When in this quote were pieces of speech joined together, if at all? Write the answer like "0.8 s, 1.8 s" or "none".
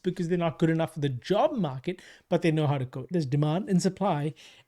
3.1 s